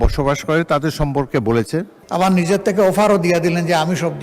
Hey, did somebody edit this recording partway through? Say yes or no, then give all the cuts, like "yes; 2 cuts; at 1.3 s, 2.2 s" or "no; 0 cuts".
yes; 1 cut; at 2.0 s